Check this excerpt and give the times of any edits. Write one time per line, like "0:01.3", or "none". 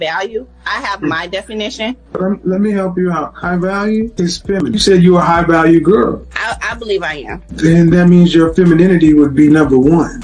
0:04.6

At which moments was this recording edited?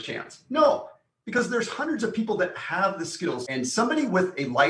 0:03.4

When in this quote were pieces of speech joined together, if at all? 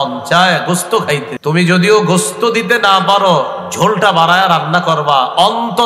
0:01.3

